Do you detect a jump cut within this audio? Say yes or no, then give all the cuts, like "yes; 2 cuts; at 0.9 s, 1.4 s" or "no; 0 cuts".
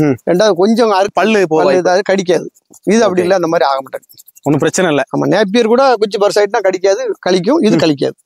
yes; 1 cut; at 1.1 s